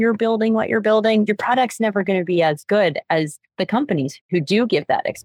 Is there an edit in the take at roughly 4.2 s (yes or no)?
yes